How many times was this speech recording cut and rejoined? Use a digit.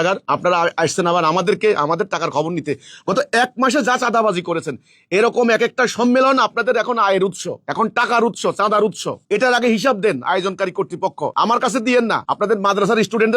2